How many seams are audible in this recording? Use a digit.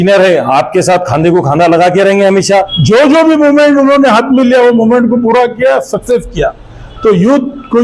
1